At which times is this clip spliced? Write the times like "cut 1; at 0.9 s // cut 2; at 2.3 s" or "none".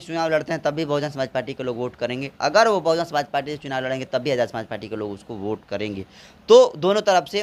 none